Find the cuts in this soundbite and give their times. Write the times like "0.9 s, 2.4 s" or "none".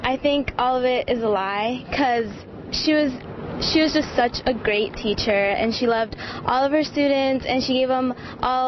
5.0 s